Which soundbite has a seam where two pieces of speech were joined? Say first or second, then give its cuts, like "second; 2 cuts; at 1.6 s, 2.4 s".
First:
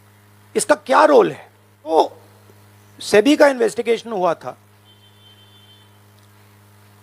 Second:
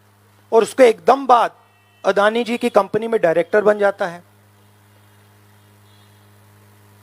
first; 1 cut; at 2.0 s